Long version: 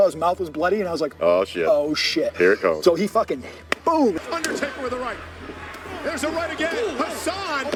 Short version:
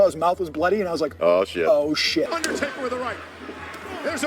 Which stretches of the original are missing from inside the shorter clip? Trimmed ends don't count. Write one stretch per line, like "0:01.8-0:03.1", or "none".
0:02.3-0:04.3